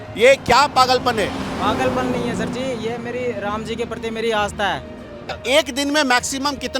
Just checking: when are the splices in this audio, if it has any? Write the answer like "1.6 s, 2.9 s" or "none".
5.3 s